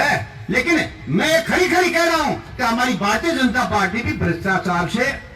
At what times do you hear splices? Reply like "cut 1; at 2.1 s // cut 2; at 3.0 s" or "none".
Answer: none